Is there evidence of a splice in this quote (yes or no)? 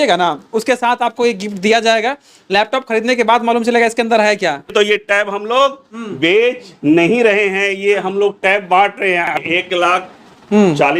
yes